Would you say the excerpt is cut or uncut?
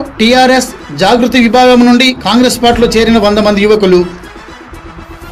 uncut